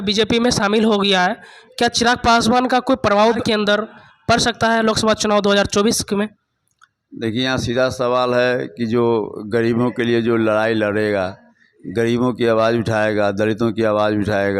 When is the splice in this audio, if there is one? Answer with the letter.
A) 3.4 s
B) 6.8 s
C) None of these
A